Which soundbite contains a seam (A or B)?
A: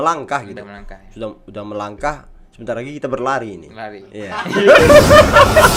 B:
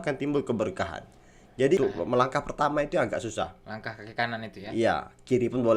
B